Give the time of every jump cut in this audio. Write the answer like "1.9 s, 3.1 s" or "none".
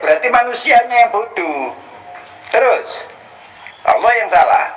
none